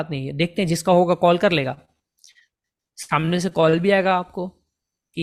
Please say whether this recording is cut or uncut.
uncut